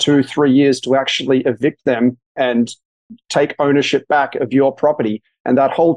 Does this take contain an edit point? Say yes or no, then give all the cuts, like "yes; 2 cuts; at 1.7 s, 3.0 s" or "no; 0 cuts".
no; 0 cuts